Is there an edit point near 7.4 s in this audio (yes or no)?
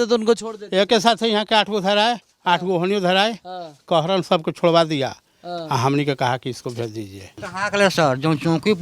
yes